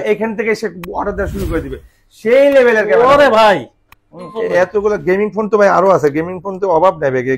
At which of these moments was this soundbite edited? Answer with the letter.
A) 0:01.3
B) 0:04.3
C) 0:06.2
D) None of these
B